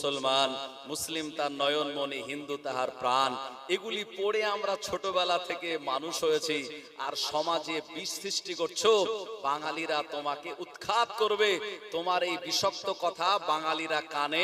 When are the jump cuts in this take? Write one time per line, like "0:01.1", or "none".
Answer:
0:06.9